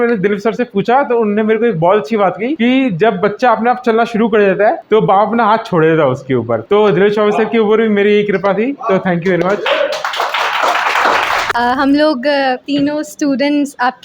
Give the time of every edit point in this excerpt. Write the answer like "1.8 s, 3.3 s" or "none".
none